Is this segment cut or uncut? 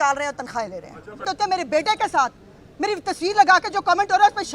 cut